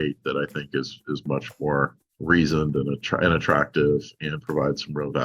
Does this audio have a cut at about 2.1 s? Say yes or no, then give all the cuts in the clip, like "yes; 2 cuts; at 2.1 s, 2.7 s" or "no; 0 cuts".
yes; 1 cut; at 2.1 s